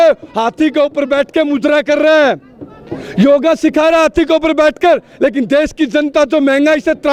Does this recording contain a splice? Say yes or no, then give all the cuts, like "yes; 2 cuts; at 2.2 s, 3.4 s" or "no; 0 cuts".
no; 0 cuts